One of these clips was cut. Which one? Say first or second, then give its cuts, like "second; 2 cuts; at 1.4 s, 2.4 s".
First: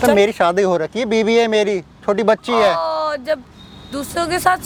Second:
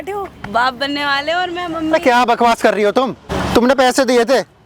second; 1 cut; at 3.3 s